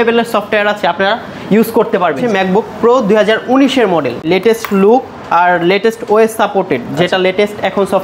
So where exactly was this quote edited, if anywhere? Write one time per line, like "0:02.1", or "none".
0:02.2

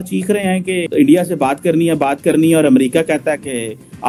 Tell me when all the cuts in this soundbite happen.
none

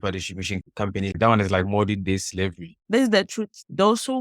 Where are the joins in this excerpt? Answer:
0:01.1
0:02.7

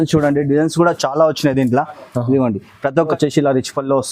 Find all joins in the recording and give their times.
0:03.1

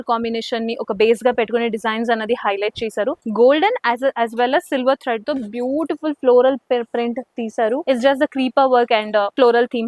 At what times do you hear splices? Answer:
0:03.2
0:07.8

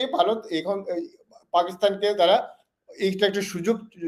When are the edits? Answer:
none

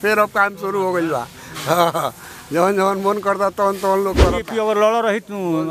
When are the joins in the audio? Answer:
0:04.4

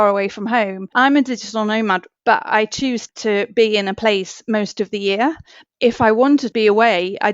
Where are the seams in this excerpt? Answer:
0:00.9
0:02.1
0:03.1
0:05.6
0:06.5

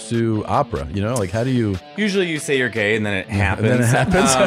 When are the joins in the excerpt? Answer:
none

